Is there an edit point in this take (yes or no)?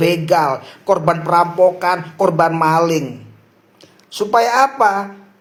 no